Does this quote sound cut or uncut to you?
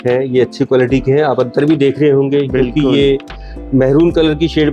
uncut